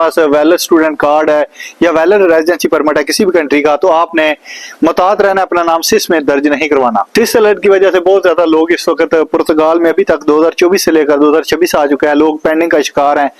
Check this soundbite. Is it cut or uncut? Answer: uncut